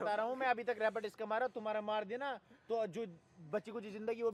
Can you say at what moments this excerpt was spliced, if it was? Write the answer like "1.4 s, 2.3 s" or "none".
none